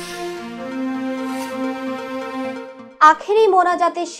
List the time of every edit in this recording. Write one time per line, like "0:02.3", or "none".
none